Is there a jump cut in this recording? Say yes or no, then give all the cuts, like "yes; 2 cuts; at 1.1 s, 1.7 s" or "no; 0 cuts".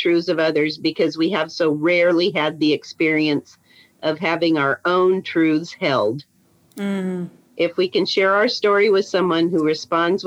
no; 0 cuts